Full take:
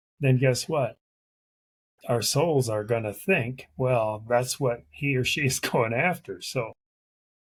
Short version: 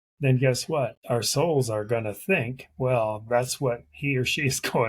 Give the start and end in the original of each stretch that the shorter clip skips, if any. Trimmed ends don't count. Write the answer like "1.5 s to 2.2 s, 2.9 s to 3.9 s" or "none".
1.0 s to 2.0 s

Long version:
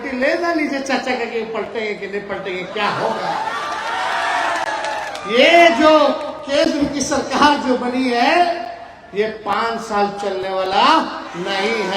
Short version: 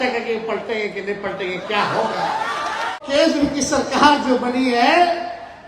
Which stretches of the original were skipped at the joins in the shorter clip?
4.0 s to 6.3 s

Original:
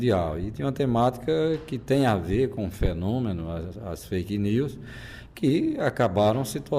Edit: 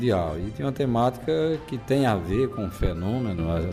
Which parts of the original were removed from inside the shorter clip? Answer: none

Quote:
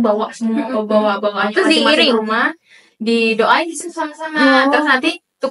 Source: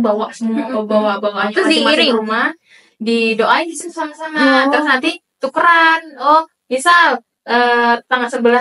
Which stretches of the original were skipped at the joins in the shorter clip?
none

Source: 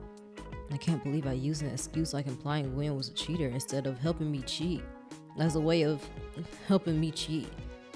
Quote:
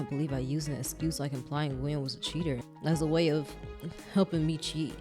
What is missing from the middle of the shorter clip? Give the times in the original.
3.6 s to 5.2 s

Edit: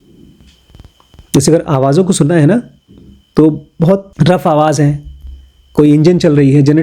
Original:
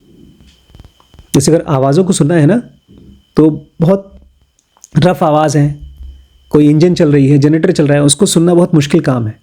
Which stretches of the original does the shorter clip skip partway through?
4.1 s to 4.8 s

